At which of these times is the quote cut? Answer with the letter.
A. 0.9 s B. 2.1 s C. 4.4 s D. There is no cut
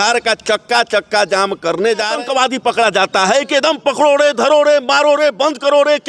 B